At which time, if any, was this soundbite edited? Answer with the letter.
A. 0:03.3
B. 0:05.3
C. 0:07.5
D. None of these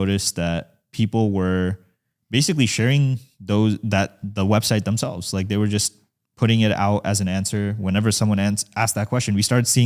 D